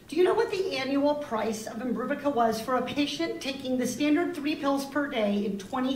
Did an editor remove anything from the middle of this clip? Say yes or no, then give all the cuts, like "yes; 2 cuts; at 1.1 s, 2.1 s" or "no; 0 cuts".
yes; 1 cut; at 4.4 s